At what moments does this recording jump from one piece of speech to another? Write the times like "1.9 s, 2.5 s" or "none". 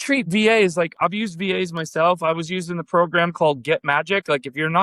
0.9 s